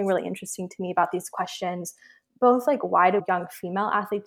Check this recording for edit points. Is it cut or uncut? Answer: cut